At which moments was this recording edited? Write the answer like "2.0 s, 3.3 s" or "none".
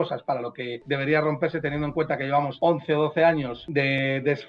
0.8 s, 2.5 s, 3.6 s

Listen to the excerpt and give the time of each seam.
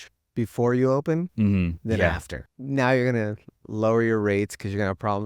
2.3 s

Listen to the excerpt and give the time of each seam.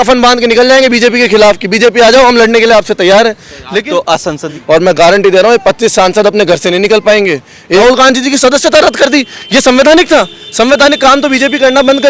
4.4 s, 7.8 s

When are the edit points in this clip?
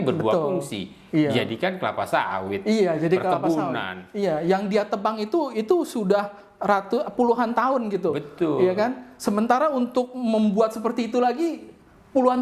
none

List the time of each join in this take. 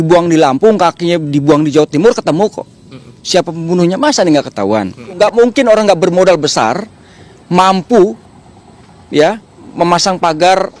5.1 s

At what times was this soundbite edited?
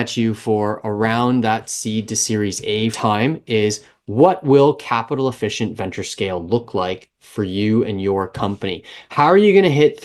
3.0 s

